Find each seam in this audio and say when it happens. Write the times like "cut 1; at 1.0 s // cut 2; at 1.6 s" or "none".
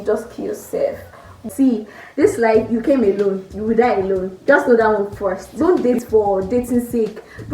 cut 1; at 1.4 s // cut 2; at 5.4 s